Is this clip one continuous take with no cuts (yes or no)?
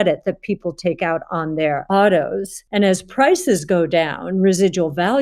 no